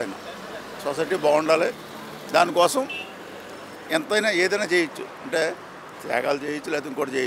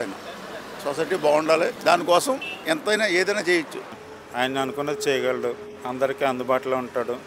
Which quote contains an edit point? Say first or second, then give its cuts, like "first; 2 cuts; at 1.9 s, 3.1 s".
second; 3 cuts; at 1.8 s, 2.5 s, 4.0 s